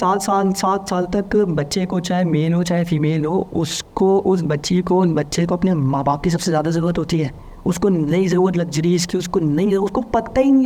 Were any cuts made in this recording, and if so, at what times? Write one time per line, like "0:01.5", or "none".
none